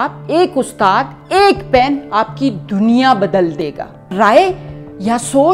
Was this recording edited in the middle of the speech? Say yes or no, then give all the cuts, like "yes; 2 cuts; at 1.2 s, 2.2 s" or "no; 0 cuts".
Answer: yes; 1 cut; at 4.1 s